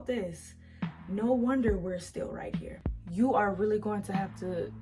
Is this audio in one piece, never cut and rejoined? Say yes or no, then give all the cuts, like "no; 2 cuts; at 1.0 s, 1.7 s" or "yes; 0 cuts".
no; 1 cut; at 2.7 s